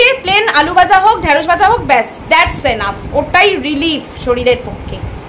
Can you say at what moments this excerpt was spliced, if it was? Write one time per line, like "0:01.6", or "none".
none